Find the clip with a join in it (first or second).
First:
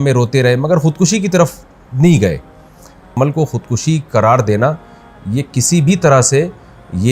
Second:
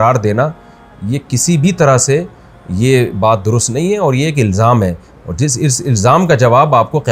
first